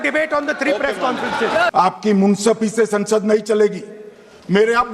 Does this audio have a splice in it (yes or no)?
yes